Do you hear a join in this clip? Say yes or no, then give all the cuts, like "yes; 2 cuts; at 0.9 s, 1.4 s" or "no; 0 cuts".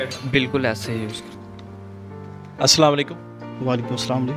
no; 0 cuts